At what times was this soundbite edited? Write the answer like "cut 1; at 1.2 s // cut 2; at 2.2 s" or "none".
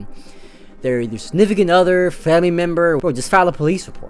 cut 1; at 3.0 s

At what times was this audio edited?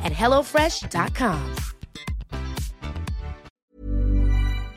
cut 1; at 3.5 s

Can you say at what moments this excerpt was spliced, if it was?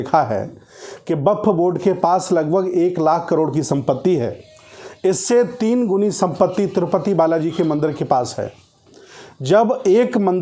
none

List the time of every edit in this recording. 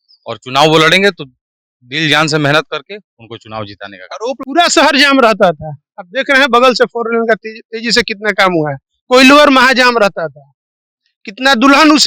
cut 1; at 4.4 s

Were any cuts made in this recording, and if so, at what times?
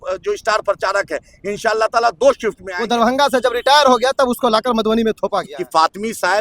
cut 1; at 2.7 s // cut 2; at 5.6 s

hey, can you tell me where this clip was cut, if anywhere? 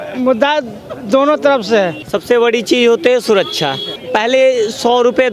none

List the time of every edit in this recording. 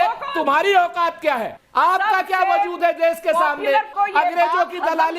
cut 1; at 3.9 s

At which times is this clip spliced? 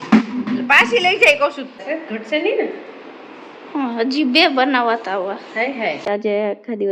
cut 1; at 1.8 s // cut 2; at 6.1 s

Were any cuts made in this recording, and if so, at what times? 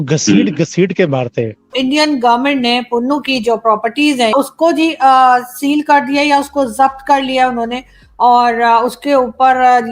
cut 1; at 1.7 s // cut 2; at 4.3 s

